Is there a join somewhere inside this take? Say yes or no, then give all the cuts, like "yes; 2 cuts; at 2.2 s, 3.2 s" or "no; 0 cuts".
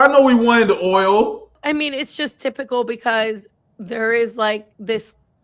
yes; 1 cut; at 1.6 s